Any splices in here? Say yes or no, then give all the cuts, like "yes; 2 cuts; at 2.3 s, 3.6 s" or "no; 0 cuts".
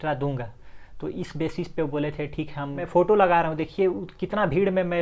yes; 1 cut; at 2.8 s